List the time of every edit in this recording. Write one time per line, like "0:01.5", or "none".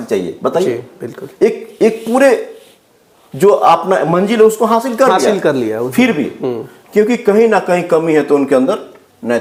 none